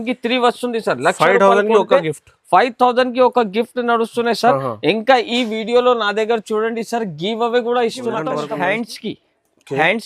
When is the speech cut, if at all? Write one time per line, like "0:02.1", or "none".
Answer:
0:08.2